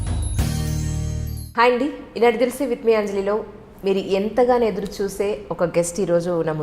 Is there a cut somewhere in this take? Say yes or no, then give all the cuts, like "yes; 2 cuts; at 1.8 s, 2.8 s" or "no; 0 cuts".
no; 0 cuts